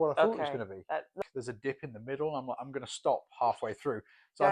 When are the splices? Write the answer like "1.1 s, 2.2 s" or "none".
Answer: 1.2 s